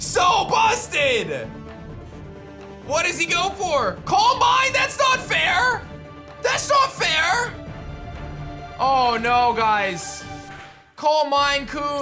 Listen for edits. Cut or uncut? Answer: uncut